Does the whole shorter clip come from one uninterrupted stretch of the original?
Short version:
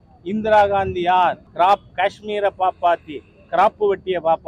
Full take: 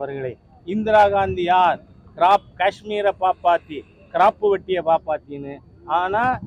no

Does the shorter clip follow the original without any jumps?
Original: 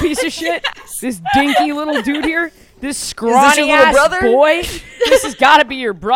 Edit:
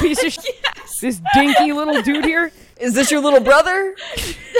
no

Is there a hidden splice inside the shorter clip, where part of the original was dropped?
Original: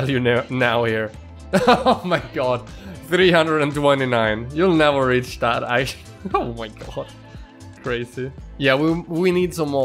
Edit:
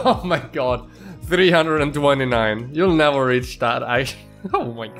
no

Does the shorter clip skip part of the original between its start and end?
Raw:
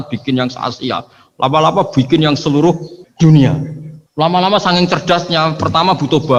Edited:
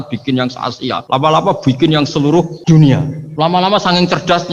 yes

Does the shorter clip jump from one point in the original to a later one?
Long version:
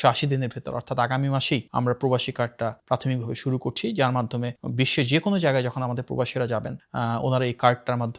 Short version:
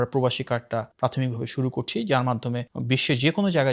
no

